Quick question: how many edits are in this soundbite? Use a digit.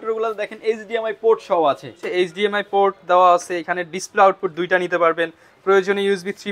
1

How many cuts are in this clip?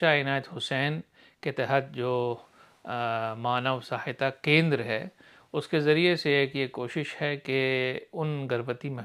0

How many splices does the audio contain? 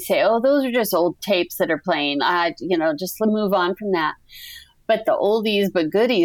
2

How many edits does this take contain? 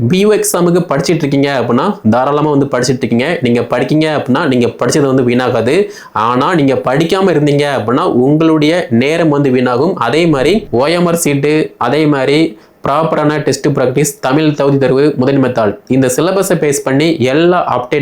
1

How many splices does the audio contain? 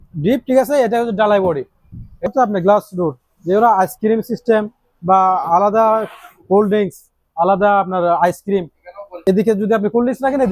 2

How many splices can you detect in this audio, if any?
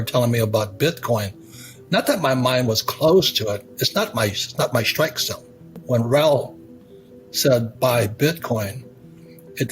1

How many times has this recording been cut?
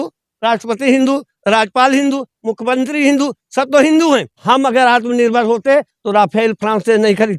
1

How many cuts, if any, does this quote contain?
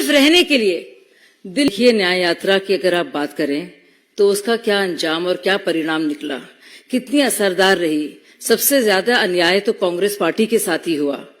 1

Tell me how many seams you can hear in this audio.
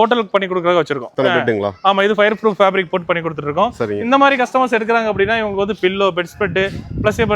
1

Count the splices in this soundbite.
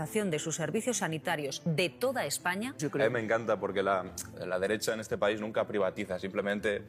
2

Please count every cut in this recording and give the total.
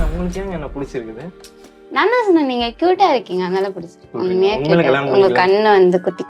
1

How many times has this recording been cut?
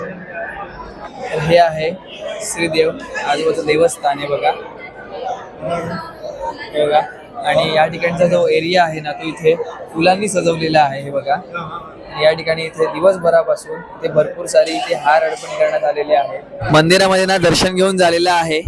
2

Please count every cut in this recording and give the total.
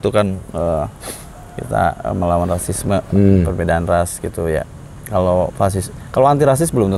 0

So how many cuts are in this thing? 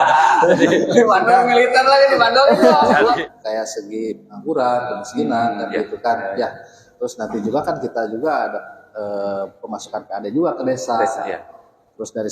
1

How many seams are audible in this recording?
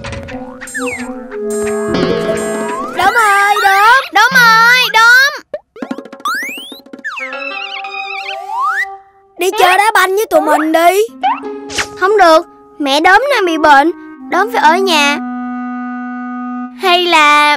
0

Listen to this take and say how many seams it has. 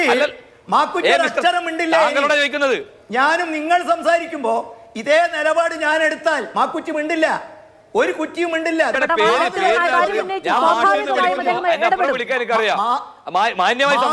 1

